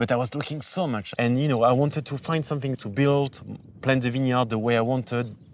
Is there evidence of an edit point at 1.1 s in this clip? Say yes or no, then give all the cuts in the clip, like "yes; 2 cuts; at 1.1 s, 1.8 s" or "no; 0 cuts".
yes; 2 cuts; at 1.1 s, 2.8 s